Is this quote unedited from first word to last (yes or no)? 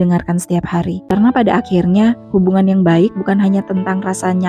no